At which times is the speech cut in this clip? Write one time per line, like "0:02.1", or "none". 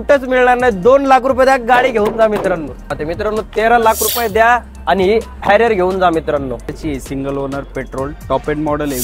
0:02.9
0:06.7